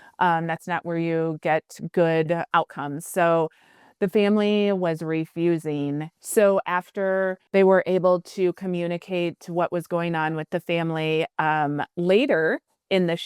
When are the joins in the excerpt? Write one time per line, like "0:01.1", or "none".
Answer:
0:02.5
0:06.2
0:07.4